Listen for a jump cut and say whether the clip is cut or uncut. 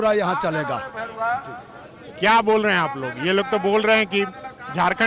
uncut